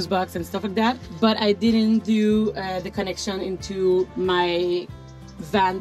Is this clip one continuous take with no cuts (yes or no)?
no